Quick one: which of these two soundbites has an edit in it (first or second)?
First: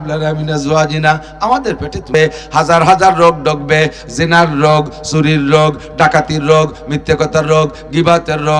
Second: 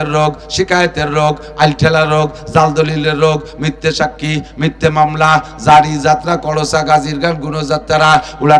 first